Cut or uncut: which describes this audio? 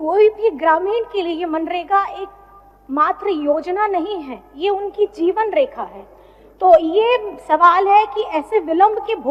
uncut